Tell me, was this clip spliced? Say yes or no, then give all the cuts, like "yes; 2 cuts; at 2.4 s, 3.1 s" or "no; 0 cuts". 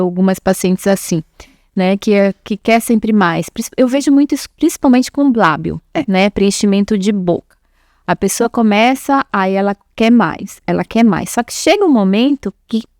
no; 0 cuts